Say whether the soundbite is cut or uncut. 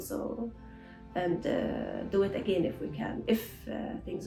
uncut